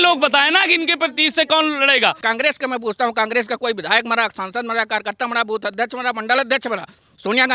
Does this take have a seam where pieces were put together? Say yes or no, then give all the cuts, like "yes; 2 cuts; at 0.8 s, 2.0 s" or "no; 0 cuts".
yes; 1 cut; at 2.2 s